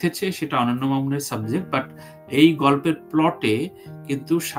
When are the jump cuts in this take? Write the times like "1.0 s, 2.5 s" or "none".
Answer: none